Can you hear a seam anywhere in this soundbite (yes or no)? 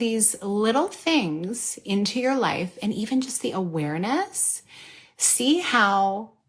no